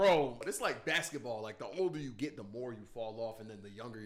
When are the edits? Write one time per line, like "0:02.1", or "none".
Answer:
none